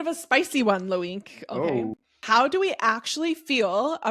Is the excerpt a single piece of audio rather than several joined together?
no; 1 cut; at 2.1 s

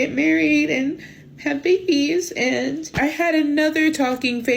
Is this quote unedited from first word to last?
no; 1 cut; at 2.9 s

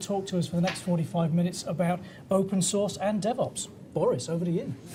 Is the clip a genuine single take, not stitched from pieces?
yes; 0 cuts

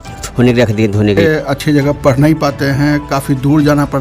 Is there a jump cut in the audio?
yes; 1 cut; at 1.5 s

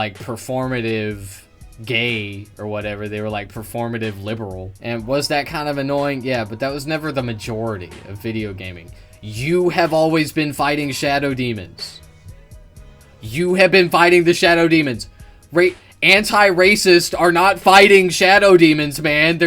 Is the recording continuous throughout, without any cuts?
no; 1 cut; at 4.7 s

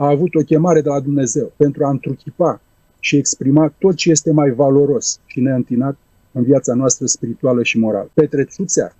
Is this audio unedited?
no; 2 cuts; at 1.5 s, 8.1 s

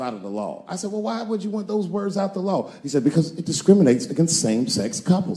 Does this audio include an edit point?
no; 0 cuts

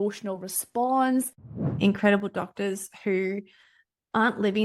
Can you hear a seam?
yes; 1 cut; at 1.7 s

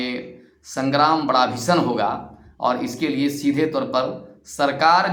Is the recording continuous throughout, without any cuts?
yes; 0 cuts

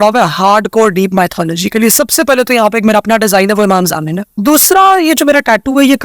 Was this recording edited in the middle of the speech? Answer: yes; 1 cut; at 4.3 s

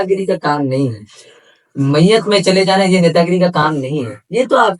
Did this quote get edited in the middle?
no; 0 cuts

